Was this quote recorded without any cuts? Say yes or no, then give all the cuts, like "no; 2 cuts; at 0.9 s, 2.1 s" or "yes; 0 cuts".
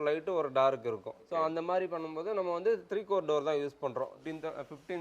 no; 2 cuts; at 1.1 s, 4.2 s